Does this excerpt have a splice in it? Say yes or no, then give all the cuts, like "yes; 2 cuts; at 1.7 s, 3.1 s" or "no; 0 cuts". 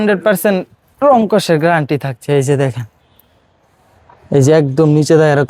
no; 0 cuts